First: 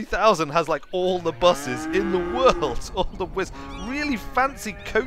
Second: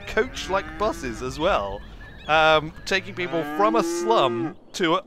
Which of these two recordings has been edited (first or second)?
first